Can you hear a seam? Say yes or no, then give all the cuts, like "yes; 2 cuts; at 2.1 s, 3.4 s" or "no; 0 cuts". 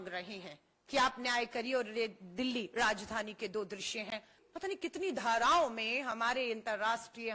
yes; 1 cut; at 4.4 s